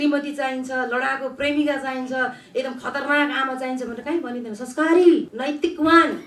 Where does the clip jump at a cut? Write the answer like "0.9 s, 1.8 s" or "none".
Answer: 5.3 s

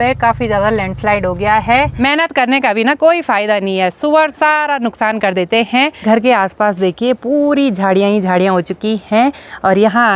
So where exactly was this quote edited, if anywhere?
1.9 s, 6.0 s

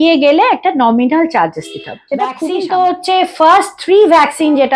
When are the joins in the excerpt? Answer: 2.4 s

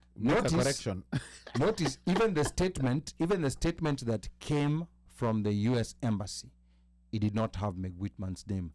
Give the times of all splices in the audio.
none

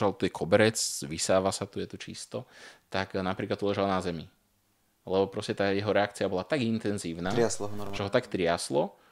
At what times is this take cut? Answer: none

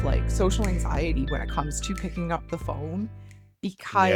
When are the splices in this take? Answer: none

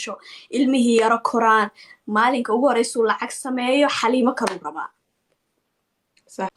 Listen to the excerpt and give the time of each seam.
none

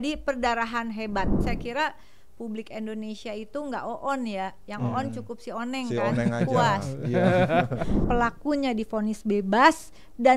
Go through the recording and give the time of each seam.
1.4 s, 8.0 s

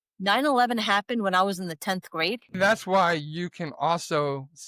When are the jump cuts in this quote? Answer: 2.5 s

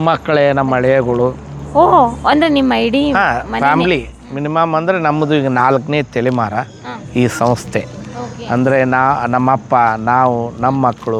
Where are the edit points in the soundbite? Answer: none

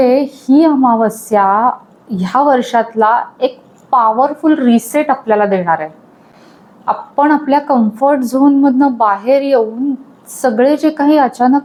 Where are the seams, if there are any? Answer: none

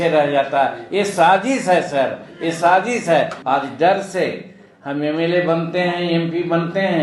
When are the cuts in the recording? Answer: 3.4 s

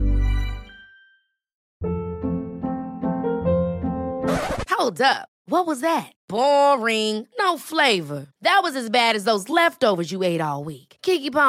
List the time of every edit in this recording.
1.5 s

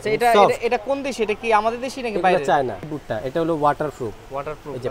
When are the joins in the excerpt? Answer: 2.9 s

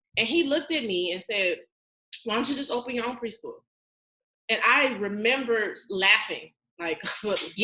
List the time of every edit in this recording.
none

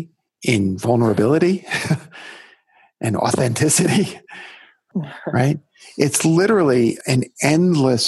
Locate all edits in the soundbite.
4.8 s, 7.0 s

